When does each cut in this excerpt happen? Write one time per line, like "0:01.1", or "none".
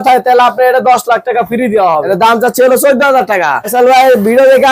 0:02.0
0:03.7

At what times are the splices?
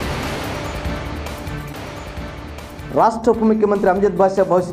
0:02.5

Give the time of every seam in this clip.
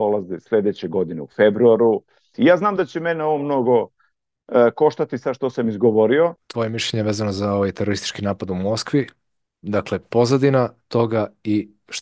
0:02.3
0:06.4

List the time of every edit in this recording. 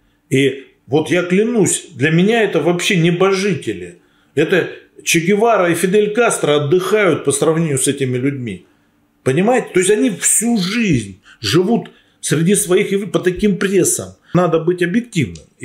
0:14.3

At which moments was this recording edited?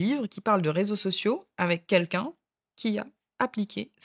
none

